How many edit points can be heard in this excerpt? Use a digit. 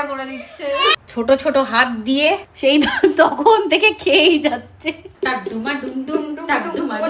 3